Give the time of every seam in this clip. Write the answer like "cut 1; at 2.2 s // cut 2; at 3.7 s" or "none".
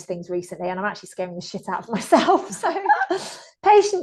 cut 1; at 2.6 s